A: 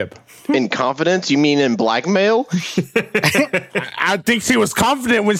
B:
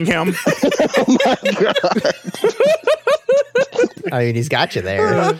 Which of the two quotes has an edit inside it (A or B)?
B